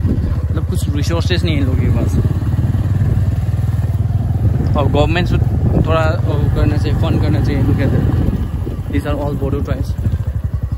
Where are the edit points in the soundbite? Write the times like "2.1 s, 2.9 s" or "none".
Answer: none